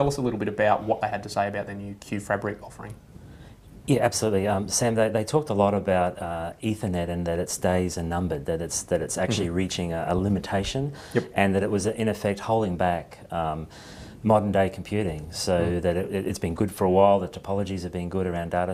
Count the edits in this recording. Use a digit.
0